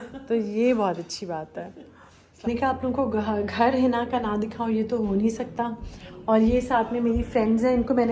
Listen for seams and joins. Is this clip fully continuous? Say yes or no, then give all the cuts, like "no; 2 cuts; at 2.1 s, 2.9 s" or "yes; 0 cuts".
no; 1 cut; at 2.5 s